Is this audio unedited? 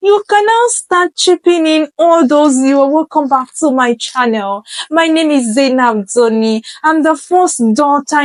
yes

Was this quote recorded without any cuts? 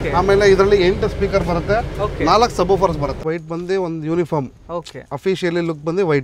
no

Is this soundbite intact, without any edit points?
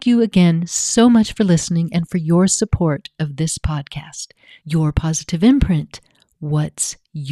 yes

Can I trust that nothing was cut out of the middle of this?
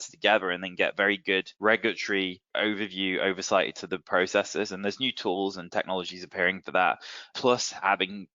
no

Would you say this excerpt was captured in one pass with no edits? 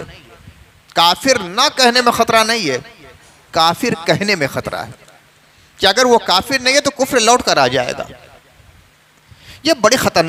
yes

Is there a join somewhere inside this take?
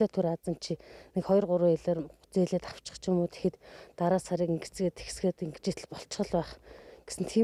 no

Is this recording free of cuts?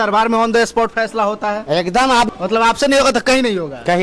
no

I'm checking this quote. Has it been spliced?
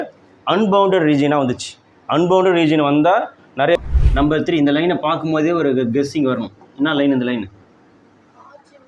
yes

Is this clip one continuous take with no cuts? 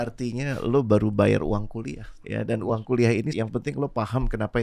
no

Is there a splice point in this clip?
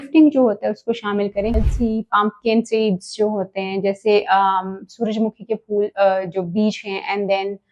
yes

